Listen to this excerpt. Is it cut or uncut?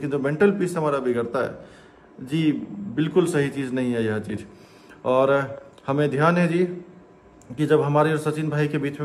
uncut